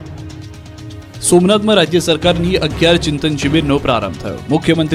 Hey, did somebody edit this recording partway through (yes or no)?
no